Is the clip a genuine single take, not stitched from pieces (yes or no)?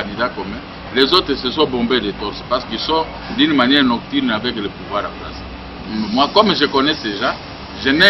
yes